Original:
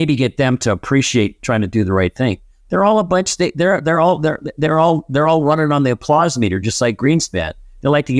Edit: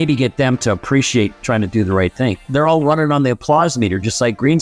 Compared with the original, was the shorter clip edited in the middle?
yes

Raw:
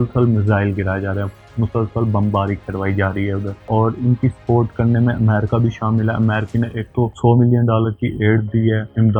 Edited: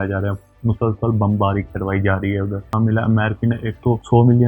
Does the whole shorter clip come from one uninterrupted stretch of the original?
no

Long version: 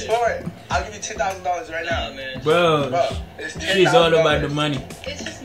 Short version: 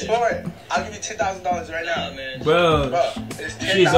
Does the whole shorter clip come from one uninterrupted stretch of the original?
yes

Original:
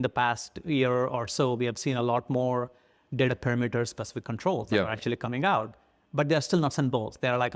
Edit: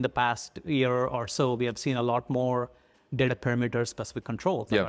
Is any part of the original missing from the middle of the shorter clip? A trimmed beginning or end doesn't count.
no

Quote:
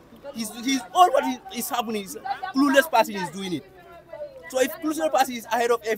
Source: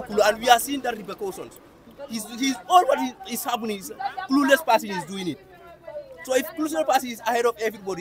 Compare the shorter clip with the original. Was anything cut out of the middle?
no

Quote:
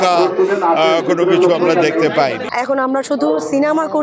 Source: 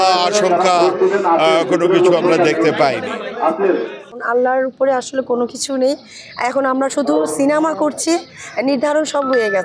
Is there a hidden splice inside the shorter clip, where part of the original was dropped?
yes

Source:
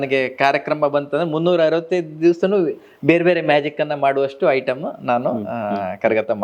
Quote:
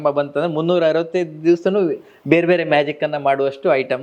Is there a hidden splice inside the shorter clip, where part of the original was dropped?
no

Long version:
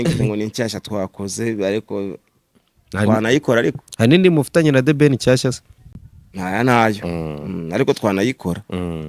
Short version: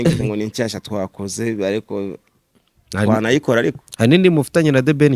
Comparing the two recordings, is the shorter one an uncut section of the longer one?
yes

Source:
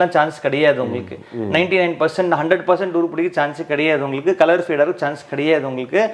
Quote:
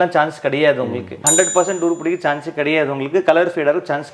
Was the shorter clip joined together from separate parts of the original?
yes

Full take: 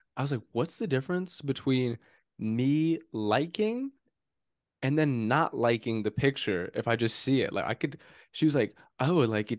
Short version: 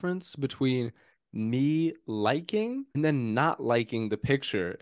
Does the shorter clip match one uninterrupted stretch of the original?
no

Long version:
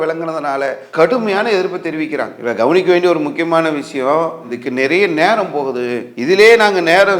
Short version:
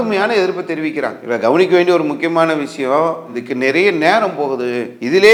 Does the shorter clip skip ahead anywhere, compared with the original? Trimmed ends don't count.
no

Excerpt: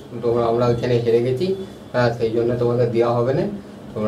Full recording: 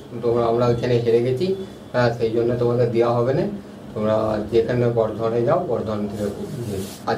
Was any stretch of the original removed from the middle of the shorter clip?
no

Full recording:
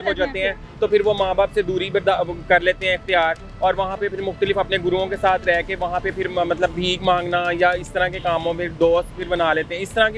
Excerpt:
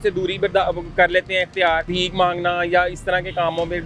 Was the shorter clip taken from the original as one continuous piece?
no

